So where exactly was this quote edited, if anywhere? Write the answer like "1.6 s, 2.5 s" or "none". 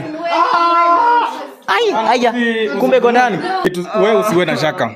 3.6 s